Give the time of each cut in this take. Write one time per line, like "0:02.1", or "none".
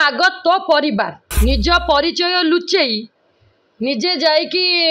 0:01.2